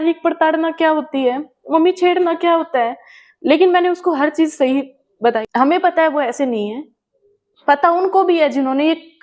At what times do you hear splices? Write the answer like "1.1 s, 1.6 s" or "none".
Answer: 5.4 s